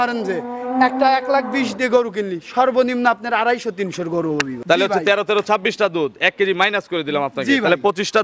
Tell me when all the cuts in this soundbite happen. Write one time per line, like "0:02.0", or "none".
0:04.5